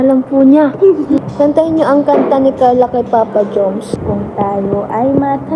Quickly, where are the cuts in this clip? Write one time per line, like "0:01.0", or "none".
0:01.2
0:03.9